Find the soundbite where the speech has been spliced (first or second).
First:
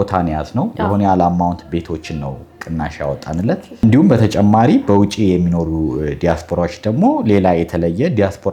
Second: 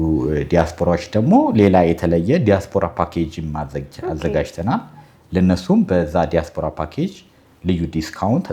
first